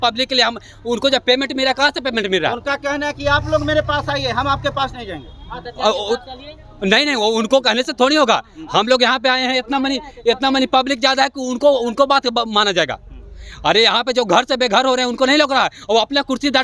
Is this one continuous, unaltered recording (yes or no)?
yes